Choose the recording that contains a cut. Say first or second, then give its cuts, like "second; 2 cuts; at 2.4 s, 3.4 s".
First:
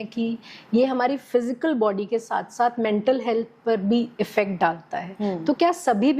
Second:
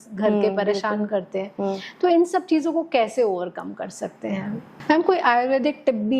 second; 1 cut; at 4.7 s